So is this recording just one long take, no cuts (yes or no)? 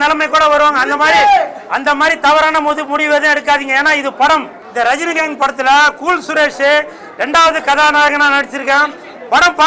no